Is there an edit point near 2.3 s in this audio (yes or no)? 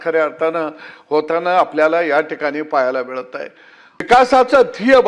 no